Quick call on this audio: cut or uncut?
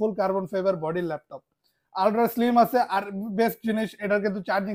uncut